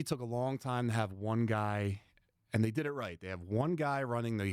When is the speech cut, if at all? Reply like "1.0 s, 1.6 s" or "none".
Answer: none